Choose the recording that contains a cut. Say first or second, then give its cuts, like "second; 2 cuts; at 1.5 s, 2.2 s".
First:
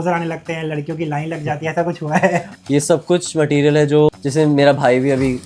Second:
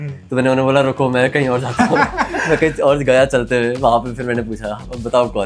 first; 2 cuts; at 2.5 s, 4.1 s